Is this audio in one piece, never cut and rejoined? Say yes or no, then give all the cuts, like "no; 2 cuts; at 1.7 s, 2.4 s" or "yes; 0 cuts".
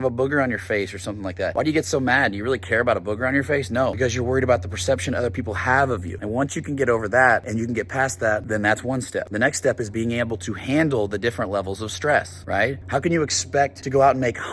yes; 0 cuts